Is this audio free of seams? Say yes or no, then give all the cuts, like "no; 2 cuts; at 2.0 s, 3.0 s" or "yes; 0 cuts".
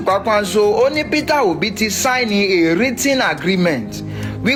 yes; 0 cuts